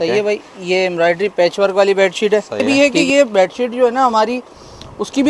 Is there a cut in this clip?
yes; 1 cut; at 2.7 s

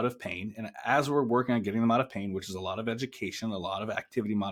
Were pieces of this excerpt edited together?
no; 0 cuts

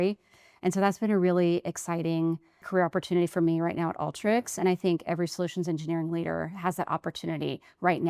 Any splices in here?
yes; 1 cut; at 2.7 s

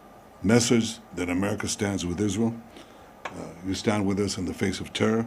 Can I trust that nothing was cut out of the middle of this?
yes; 0 cuts

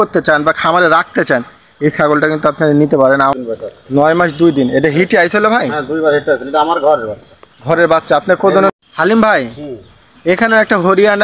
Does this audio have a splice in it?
yes; 2 cuts; at 3.3 s, 8.7 s

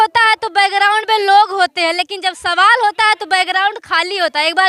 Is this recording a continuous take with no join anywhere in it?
yes; 0 cuts

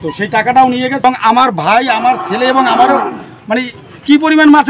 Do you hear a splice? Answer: yes; 1 cut; at 1.0 s

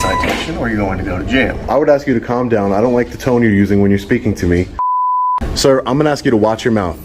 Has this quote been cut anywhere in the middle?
yes; 2 cuts; at 1.7 s, 5.0 s

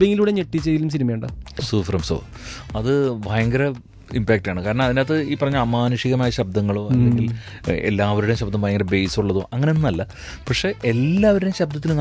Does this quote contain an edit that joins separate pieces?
yes; 1 cut; at 1.6 s

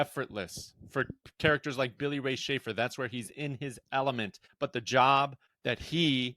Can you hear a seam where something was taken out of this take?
yes; 2 cuts; at 4.4 s, 5.5 s

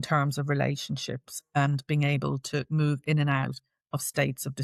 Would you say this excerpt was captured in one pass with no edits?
yes; 0 cuts

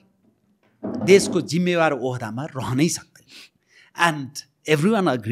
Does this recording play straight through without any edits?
yes; 0 cuts

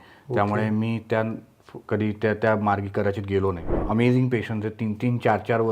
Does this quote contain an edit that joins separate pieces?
yes; 1 cut; at 3.7 s

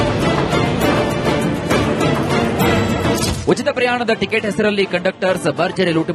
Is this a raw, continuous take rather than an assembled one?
yes; 0 cuts

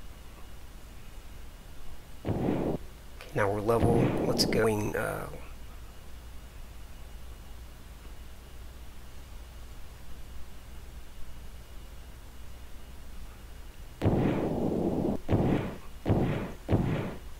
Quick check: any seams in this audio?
no; 0 cuts

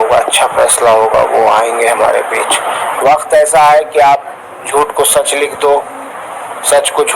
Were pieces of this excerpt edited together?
yes; 1 cut; at 2.8 s

